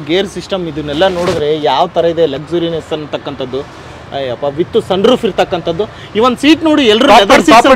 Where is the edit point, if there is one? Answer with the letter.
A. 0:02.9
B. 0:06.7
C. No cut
C